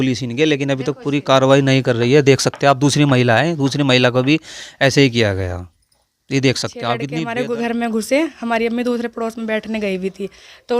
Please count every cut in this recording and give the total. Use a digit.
1